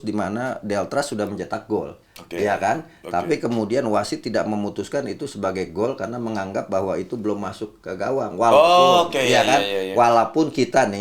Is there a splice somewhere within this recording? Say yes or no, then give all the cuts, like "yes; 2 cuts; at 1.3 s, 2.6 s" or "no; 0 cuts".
no; 0 cuts